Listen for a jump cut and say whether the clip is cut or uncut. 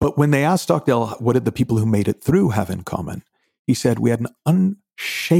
cut